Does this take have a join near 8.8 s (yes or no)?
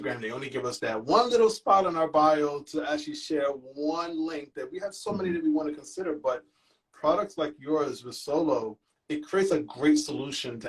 no